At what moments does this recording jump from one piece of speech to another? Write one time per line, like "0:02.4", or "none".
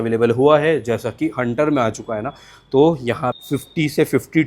0:03.3